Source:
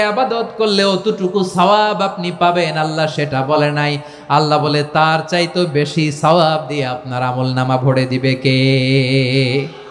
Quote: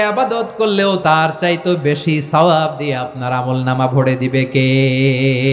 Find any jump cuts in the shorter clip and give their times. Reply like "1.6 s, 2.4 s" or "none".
1.0 s